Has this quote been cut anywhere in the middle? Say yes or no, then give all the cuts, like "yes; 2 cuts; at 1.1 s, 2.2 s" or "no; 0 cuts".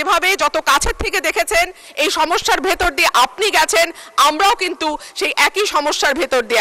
no; 0 cuts